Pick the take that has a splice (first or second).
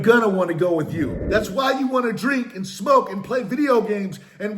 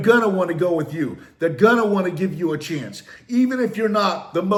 first